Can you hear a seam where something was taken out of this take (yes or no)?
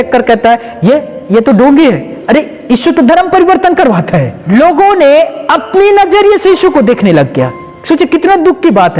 yes